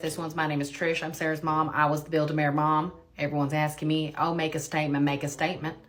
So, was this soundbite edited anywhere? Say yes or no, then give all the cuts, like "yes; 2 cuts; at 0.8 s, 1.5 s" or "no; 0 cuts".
no; 0 cuts